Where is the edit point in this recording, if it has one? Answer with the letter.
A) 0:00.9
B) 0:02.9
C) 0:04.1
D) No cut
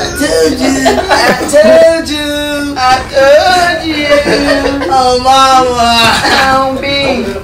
D